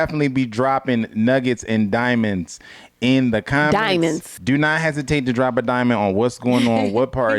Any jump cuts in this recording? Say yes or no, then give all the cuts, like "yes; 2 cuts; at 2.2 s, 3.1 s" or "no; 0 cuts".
yes; 1 cut; at 4.3 s